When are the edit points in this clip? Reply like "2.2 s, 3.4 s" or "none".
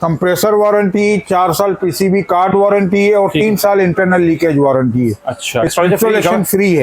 5.7 s